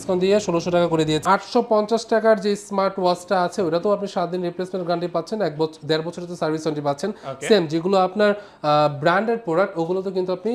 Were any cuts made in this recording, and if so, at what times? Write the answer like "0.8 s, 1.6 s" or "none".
1.2 s